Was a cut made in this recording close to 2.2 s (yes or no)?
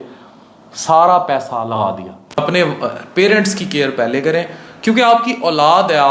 yes